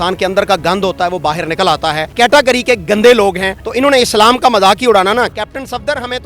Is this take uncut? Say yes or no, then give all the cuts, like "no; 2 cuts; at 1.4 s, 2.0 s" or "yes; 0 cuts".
no; 2 cuts; at 2.1 s, 5.4 s